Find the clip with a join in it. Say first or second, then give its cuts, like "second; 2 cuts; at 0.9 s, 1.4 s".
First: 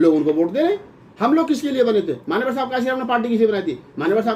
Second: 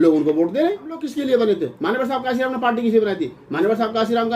second; 1 cut; at 1.1 s